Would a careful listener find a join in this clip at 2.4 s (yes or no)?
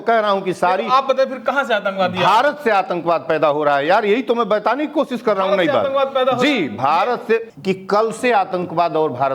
no